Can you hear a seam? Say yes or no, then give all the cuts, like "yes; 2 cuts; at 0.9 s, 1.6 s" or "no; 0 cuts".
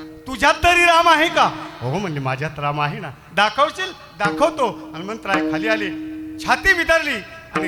no; 0 cuts